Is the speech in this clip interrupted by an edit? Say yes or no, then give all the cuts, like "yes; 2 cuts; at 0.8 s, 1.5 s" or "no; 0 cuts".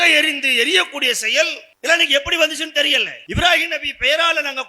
yes; 2 cuts; at 1.7 s, 3.2 s